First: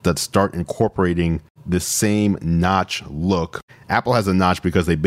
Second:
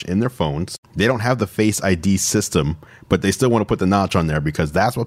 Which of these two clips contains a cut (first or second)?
first